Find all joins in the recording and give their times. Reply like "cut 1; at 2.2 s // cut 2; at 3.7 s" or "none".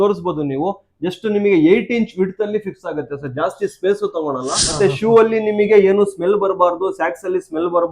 cut 1; at 4.8 s